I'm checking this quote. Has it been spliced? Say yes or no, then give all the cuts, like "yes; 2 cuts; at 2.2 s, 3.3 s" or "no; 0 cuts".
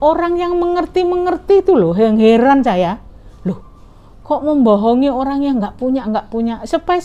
no; 0 cuts